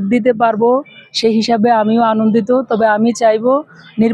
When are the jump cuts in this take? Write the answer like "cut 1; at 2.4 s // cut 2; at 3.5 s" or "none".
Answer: none